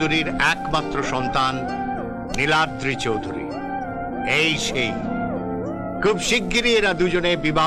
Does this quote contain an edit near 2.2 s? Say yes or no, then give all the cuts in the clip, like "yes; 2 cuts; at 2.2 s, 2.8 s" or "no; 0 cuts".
no; 0 cuts